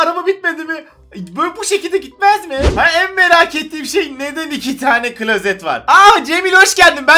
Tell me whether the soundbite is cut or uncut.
cut